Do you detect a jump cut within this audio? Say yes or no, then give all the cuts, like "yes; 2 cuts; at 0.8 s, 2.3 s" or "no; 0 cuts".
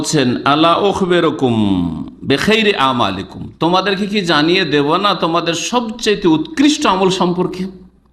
no; 0 cuts